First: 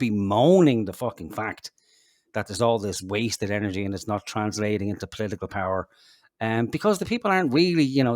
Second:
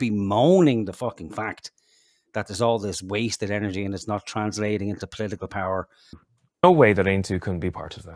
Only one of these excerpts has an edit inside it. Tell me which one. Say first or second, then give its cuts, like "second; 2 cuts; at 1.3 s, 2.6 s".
second; 1 cut; at 6.3 s